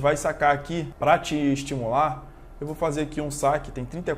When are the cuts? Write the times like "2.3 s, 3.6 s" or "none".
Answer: 0.9 s

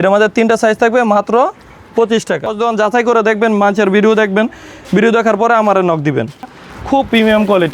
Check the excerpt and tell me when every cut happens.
2.6 s, 6.6 s

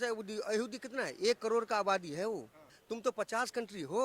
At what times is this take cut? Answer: 2.7 s

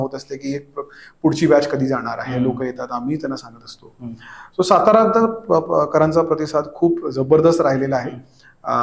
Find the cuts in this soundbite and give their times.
none

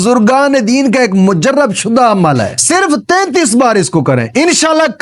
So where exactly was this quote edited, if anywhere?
2.6 s

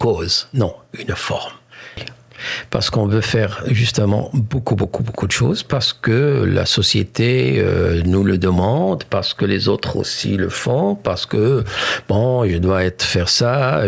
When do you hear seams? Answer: 2.0 s

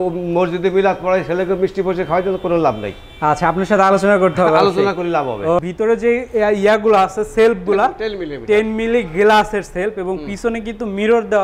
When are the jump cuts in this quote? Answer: 5.7 s

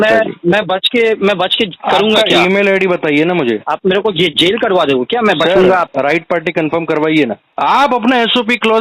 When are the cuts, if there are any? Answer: 5.9 s, 7.4 s

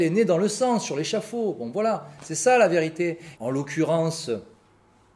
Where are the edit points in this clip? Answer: 3.3 s

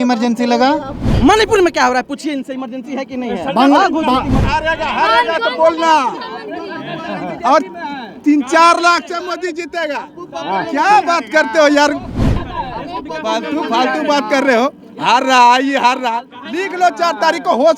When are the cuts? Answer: 1.0 s, 4.4 s, 12.3 s

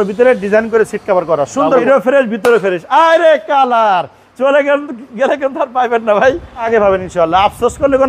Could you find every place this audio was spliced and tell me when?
1.8 s, 6.7 s

